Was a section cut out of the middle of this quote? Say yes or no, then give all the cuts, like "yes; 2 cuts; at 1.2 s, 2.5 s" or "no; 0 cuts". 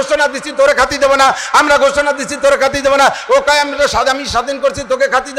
no; 0 cuts